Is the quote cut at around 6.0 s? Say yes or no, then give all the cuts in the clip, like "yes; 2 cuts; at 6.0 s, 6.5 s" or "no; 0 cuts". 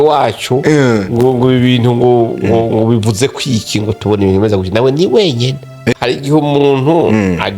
yes; 1 cut; at 6.0 s